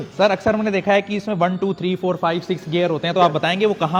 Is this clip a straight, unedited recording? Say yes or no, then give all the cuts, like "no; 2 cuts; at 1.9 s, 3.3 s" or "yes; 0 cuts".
yes; 0 cuts